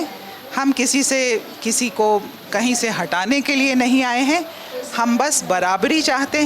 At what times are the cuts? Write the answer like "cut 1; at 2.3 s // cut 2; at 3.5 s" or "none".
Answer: none